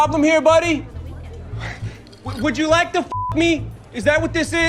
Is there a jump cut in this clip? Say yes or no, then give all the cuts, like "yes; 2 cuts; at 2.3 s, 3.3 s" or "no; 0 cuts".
no; 0 cuts